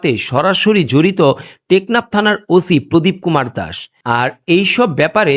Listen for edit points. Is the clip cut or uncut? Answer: uncut